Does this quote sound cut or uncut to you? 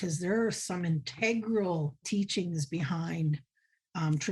cut